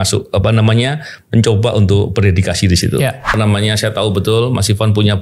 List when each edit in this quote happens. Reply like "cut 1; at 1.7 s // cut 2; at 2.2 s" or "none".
cut 1; at 3.3 s